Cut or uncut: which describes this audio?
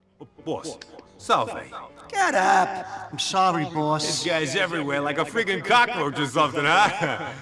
uncut